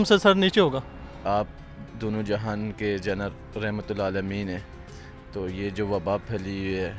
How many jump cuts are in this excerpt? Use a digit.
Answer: 1